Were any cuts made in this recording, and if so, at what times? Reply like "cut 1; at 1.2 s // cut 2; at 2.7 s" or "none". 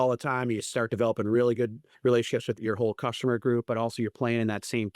cut 1; at 1.8 s